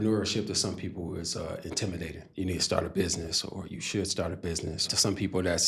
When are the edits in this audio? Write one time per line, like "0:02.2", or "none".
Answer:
0:02.2
0:04.9

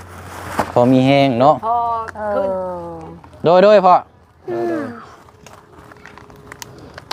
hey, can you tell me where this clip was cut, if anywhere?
none

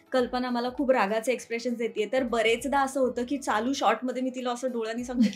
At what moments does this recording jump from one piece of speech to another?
none

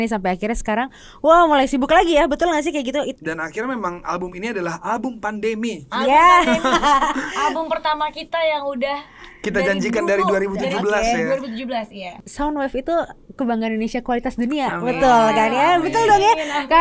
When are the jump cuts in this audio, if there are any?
0:03.1
0:12.2

